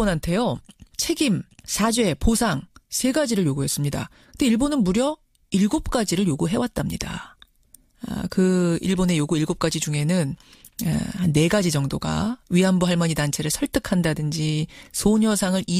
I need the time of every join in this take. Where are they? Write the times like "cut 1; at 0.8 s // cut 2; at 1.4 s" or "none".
none